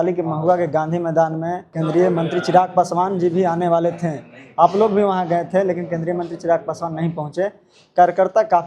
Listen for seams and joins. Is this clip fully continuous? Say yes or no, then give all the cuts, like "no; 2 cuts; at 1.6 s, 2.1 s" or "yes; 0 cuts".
no; 1 cut; at 1.6 s